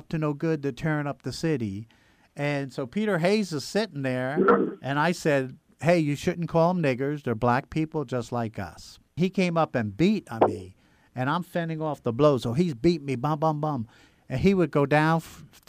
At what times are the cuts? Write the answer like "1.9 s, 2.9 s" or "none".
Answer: 9.1 s